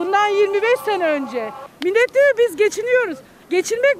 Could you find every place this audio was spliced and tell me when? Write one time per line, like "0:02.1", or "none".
0:01.6